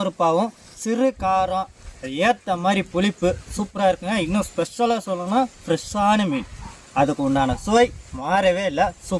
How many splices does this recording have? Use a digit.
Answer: 1